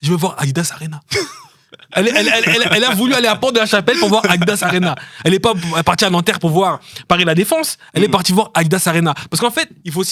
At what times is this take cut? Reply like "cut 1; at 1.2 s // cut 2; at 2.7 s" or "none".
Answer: none